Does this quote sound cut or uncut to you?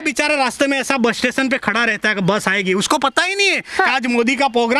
uncut